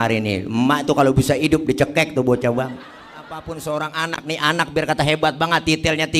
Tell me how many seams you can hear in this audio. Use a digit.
1